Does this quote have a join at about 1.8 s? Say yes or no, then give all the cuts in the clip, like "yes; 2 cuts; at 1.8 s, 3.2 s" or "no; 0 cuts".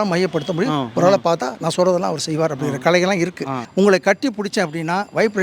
no; 1 cut; at 3.6 s